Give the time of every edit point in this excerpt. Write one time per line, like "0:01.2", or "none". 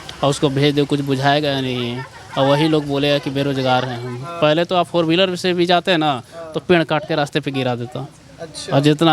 0:04.3